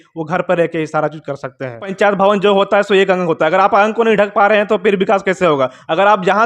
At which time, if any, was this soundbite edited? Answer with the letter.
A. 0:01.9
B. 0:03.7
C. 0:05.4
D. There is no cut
A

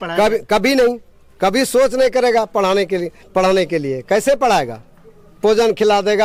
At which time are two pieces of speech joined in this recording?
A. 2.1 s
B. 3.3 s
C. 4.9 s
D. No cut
D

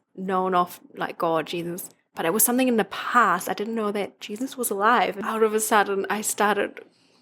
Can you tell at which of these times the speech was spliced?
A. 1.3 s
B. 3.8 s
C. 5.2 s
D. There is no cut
C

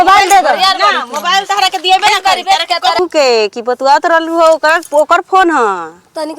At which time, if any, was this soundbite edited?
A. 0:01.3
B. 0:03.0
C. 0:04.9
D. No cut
B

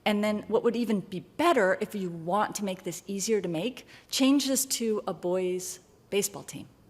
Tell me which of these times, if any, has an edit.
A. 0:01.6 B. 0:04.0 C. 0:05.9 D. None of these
C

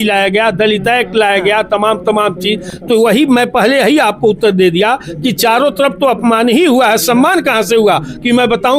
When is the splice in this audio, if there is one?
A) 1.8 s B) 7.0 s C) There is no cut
C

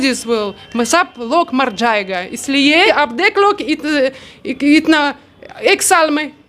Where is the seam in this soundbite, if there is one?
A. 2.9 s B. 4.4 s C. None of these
A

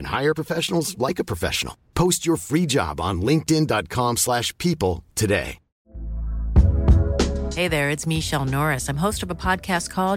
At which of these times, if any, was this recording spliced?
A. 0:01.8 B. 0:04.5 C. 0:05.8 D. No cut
C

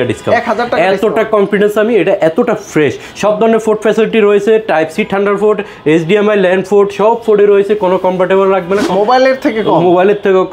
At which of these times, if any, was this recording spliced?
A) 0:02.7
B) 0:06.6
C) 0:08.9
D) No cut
C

